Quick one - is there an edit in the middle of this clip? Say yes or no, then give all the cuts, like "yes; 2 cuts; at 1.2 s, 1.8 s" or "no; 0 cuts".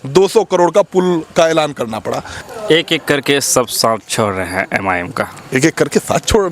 yes; 1 cut; at 2.3 s